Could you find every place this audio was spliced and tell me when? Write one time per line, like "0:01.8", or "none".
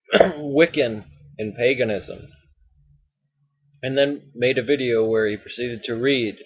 0:05.5